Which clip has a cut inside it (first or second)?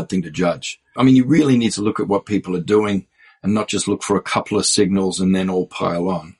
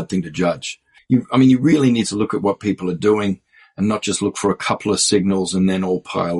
first